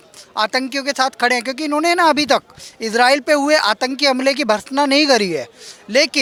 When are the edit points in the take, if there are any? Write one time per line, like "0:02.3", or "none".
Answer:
none